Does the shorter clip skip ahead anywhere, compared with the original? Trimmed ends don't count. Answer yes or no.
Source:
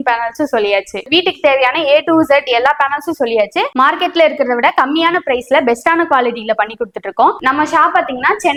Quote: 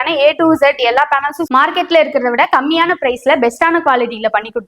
yes